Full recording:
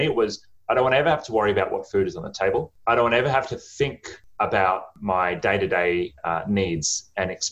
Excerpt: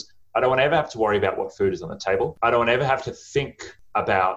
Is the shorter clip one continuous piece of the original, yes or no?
no